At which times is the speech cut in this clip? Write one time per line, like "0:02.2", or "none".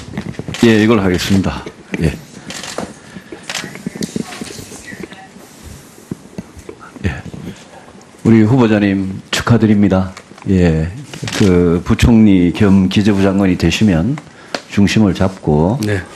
none